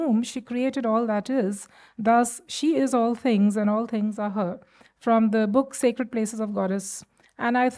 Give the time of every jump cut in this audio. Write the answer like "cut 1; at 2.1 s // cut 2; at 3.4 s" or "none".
none